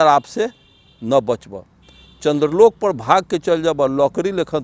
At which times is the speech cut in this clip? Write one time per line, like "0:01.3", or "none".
none